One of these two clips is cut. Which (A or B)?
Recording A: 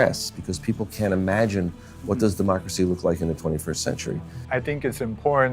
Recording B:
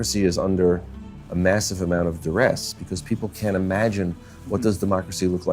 A